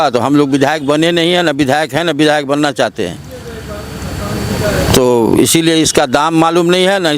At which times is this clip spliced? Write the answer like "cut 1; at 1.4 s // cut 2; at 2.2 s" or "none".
none